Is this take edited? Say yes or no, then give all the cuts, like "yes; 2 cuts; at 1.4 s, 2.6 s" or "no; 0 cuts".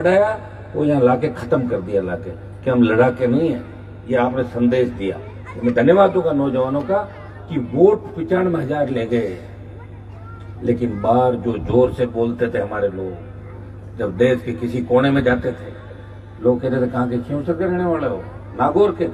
no; 0 cuts